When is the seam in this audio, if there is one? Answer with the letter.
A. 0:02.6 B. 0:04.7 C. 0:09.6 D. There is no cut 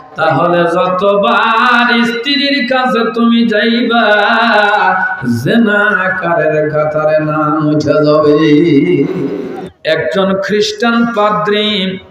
C